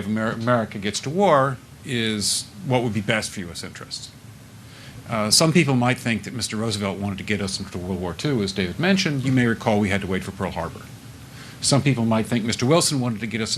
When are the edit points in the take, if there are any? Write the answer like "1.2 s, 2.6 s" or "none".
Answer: 4.4 s, 8.5 s